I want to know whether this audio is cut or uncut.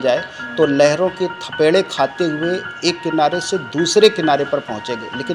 uncut